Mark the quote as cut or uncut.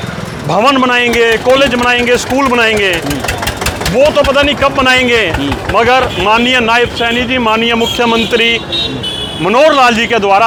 uncut